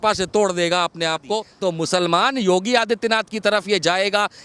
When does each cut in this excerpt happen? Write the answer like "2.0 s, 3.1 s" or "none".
1.5 s